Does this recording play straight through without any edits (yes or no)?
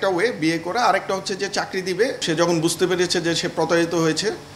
no